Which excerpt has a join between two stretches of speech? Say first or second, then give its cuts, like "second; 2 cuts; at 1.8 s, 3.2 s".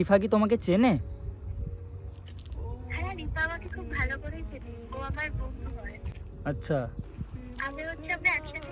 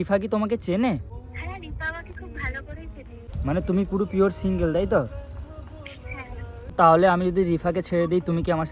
second; 3 cuts; at 1.1 s, 3.2 s, 6.7 s